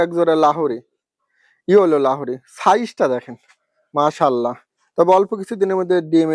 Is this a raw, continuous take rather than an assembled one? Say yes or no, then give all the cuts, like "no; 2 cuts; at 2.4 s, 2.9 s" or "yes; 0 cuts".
yes; 0 cuts